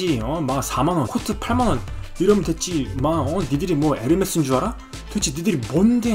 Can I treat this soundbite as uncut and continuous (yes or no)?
no